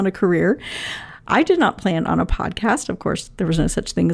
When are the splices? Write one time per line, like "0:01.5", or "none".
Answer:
none